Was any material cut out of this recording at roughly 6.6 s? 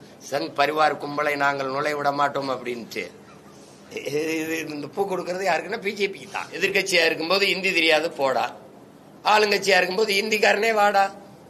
yes; 1 cut; at 6.6 s

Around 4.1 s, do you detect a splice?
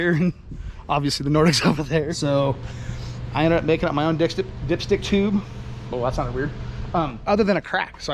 no; 2 cuts; at 2.1 s, 7.2 s

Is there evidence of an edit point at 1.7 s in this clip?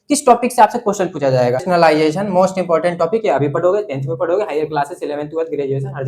yes; 1 cut; at 1.7 s

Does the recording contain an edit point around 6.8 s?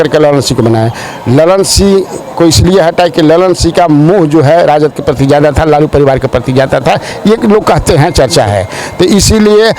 no; 0 cuts

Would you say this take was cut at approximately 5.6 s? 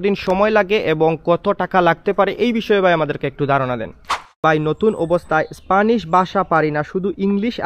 no; 1 cut; at 4.4 s

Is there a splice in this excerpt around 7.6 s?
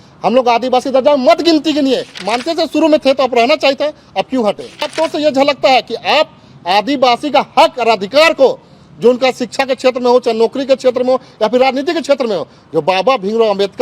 no; 2 cuts; at 2.1 s, 4.9 s

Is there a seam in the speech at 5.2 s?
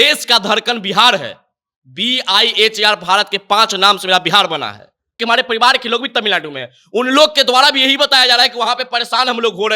yes; 1 cut; at 5.2 s

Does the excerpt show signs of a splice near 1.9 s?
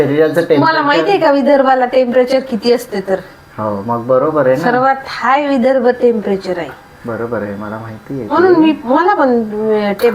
no; 0 cuts

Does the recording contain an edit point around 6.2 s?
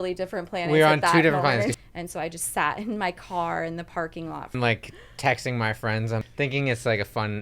yes; 3 cuts; at 1.7 s, 4.5 s, 6.2 s

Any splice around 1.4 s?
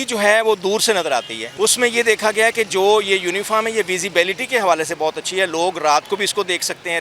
yes; 1 cut; at 1.4 s

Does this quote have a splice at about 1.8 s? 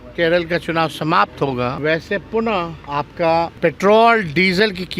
yes; 3 cuts; at 1.8 s, 2.8 s, 3.5 s

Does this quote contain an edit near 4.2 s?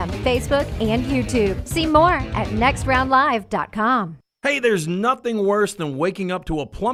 no; 0 cuts

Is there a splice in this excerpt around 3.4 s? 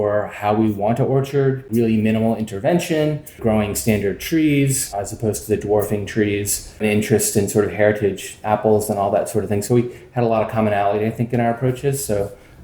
yes; 3 cuts; at 1.6 s, 3.4 s, 6.8 s

